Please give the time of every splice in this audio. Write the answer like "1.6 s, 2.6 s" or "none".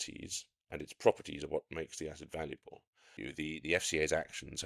3.2 s